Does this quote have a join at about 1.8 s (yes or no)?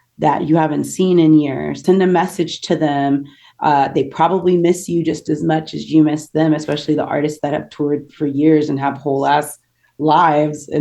yes